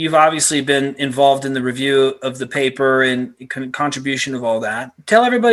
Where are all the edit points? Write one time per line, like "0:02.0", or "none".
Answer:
none